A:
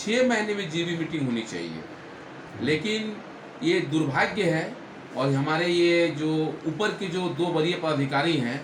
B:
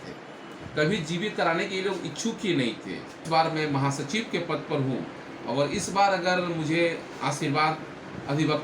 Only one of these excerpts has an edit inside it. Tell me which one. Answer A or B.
B